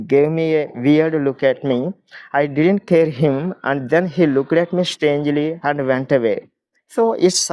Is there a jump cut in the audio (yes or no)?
no